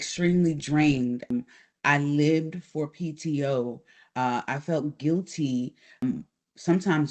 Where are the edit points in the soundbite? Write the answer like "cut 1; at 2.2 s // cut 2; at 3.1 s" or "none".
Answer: none

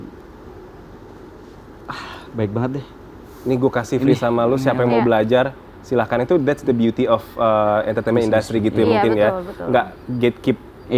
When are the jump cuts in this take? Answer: none

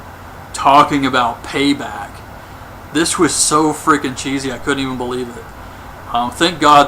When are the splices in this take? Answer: cut 1; at 4.4 s

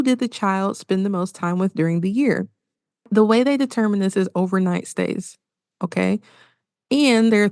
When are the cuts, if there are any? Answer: cut 1; at 3.1 s

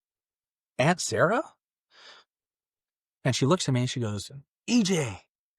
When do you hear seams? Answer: none

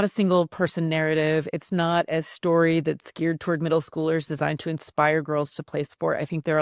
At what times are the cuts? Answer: none

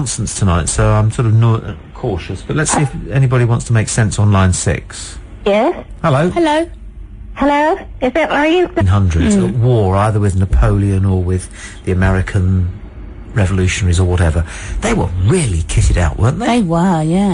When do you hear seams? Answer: none

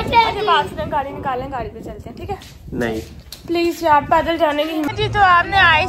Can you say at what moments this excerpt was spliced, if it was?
cut 1; at 4.9 s

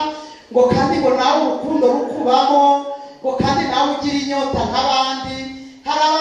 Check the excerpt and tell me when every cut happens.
none

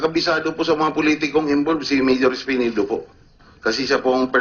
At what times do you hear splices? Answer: cut 1; at 2.6 s

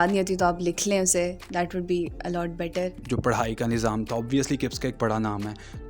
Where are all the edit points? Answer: cut 1; at 3.0 s

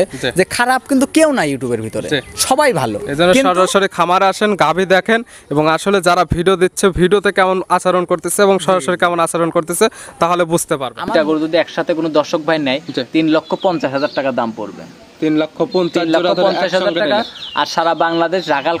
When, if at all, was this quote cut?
cut 1; at 11.1 s

